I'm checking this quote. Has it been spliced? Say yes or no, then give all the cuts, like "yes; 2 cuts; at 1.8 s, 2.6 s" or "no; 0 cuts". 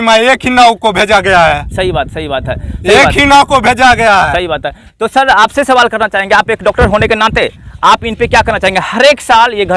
no; 0 cuts